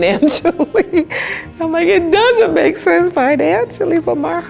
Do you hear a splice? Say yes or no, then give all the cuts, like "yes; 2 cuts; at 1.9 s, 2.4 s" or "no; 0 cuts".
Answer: no; 0 cuts